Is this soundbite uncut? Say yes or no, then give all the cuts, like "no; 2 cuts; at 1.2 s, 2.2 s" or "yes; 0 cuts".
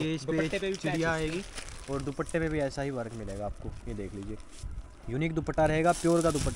yes; 0 cuts